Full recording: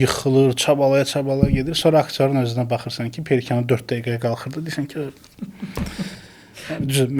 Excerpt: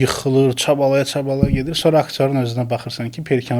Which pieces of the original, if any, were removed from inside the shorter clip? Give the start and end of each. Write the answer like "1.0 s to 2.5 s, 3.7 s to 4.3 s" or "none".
none